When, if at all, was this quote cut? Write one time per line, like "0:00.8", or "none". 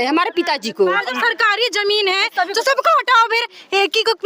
0:01.0